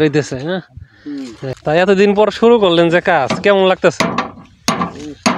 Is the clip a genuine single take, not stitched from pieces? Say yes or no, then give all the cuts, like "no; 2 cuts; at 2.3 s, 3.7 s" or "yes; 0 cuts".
no; 1 cut; at 1.5 s